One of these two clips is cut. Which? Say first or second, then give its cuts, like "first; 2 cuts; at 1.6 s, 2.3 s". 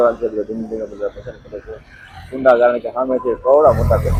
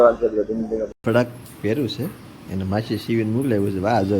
second; 1 cut; at 0.9 s